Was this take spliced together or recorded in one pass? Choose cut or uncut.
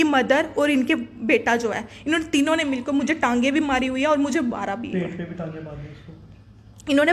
uncut